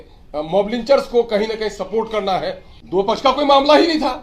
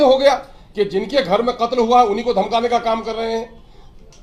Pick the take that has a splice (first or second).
first